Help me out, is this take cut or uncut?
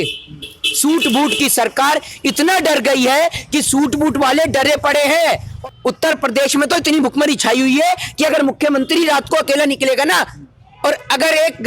cut